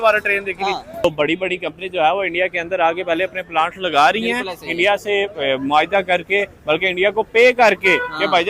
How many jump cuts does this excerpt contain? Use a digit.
1